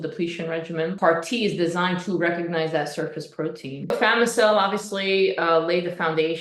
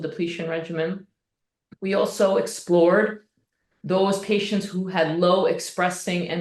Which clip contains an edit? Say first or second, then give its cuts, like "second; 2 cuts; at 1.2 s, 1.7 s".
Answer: first; 2 cuts; at 0.9 s, 3.9 s